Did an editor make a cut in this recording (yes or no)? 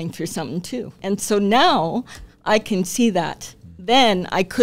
yes